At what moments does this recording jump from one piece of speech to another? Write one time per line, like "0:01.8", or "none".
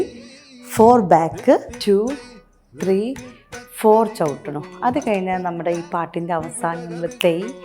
0:01.7